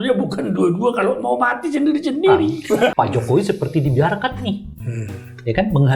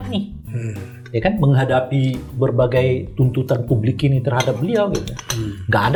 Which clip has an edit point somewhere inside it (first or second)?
first